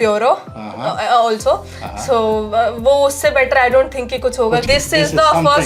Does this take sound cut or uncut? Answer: cut